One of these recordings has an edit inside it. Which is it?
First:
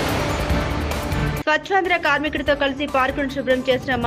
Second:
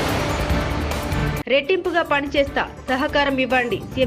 second; 1 cut; at 1.4 s

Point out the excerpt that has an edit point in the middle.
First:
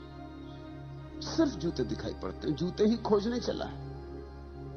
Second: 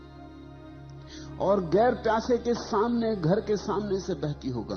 second; 1 cut; at 1.3 s

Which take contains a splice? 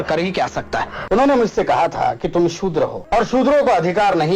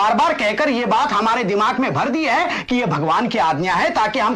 first; 2 cuts; at 0.9 s, 3.0 s

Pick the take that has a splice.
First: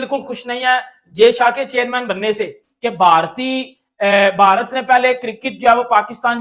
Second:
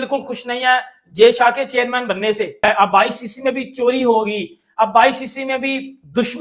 second; 1 cut; at 2.5 s

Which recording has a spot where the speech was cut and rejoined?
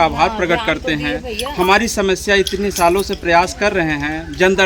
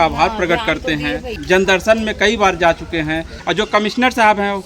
second; 2 cuts; at 1.3 s, 3.4 s

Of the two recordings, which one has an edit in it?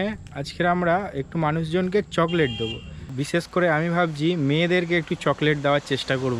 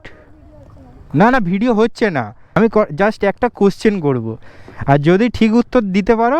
second; 1 cut; at 2.4 s

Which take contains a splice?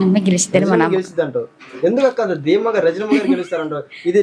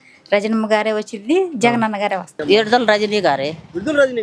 second; 1 cut; at 2.4 s

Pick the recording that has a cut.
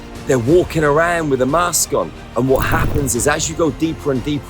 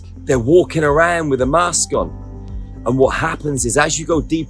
first; 1 cut; at 2.2 s

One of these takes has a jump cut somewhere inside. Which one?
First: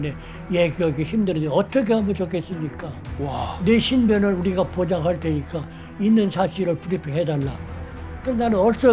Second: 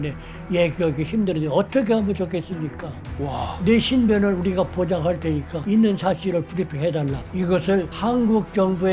second; 3 cuts; at 5.5 s, 7.2 s, 7.9 s

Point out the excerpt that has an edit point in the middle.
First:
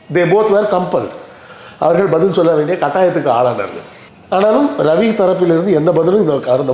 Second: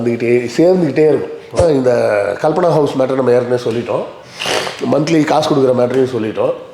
second; 1 cut; at 1.6 s

